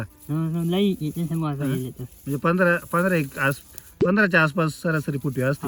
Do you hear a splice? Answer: no; 0 cuts

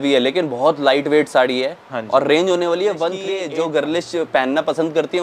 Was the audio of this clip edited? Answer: yes; 1 cut; at 3.3 s

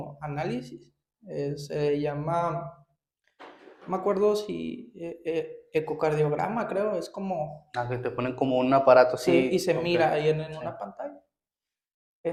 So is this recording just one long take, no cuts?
yes; 0 cuts

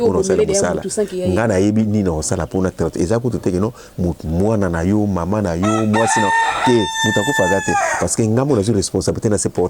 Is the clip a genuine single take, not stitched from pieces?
yes; 0 cuts

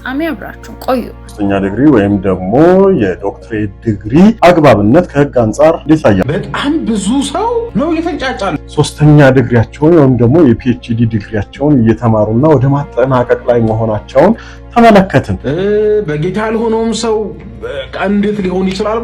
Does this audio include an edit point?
yes; 6 cuts; at 1.3 s, 4.4 s, 5.9 s, 7.7 s, 8.6 s, 15.4 s

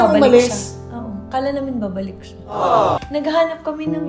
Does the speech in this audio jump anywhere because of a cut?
yes; 1 cut; at 3.0 s

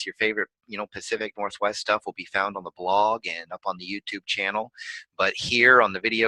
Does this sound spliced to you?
yes; 1 cut; at 5.1 s

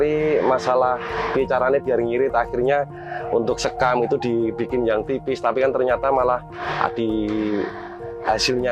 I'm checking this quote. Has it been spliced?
no; 0 cuts

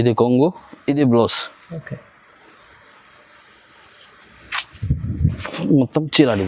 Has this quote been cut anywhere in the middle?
no; 0 cuts

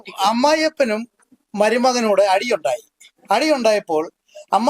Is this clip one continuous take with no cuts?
yes; 0 cuts

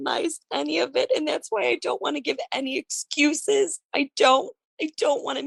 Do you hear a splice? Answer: no; 0 cuts

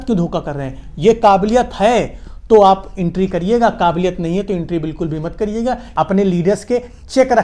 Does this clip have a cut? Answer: yes; 1 cut; at 5.9 s

